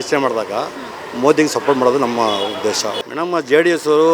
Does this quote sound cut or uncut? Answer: cut